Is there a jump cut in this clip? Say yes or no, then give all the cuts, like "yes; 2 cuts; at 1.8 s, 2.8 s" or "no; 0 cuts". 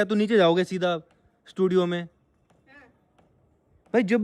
no; 0 cuts